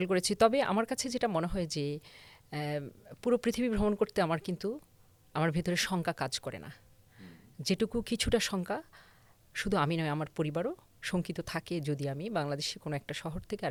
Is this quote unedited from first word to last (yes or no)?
yes